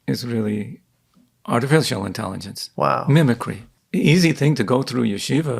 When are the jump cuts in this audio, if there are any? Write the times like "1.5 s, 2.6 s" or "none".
3.7 s

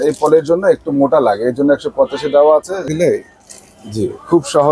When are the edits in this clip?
2.9 s

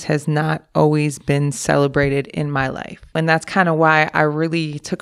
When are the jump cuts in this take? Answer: 3.1 s

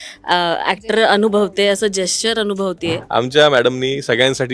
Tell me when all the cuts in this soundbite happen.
3.0 s

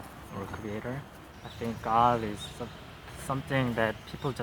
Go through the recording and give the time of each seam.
1.2 s

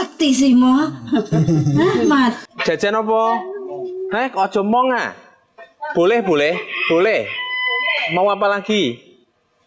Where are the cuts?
2.5 s

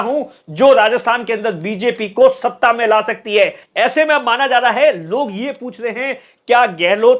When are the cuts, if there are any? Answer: 3.6 s

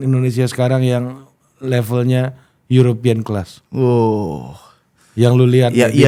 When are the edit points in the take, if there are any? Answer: none

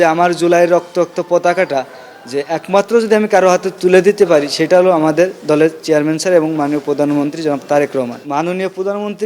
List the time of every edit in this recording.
8.2 s

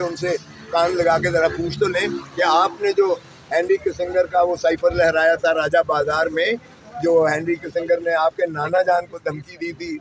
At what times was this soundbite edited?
none

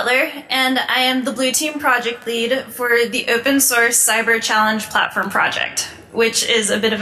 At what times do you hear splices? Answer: none

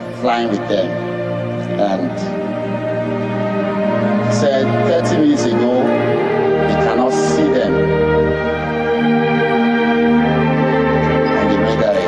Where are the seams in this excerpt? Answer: none

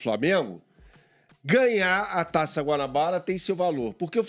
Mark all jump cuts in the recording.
none

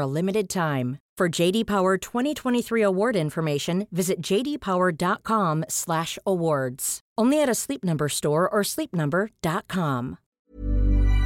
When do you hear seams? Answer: 10.2 s

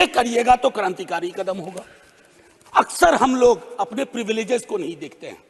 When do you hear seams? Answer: none

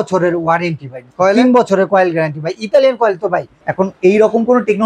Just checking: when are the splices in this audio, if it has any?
1.0 s, 3.6 s

